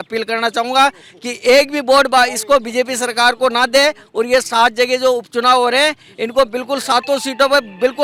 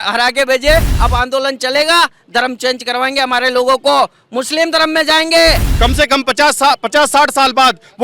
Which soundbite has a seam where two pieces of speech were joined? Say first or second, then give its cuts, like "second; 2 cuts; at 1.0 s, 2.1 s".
second; 2 cuts; at 0.9 s, 5.7 s